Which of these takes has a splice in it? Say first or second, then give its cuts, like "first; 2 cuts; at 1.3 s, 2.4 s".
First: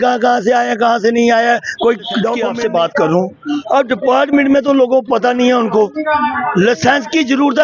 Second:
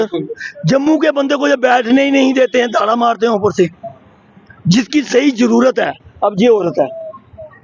first; 1 cut; at 2.4 s